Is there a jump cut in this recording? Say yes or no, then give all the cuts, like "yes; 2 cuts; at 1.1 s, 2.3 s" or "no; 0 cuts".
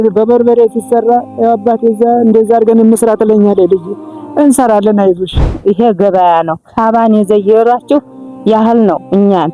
yes; 1 cut; at 5.5 s